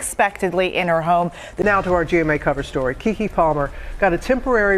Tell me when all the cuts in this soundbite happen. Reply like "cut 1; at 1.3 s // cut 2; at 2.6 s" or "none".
cut 1; at 1.5 s